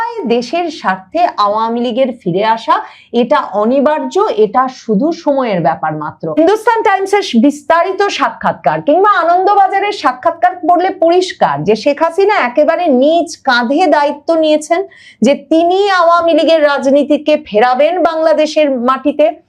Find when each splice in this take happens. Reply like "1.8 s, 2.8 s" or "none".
6.4 s